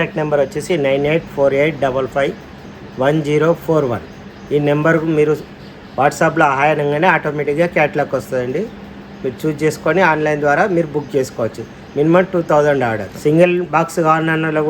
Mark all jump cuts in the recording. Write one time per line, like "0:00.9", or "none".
0:13.1